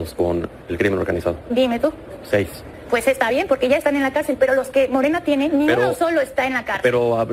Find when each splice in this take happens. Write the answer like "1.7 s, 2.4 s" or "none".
none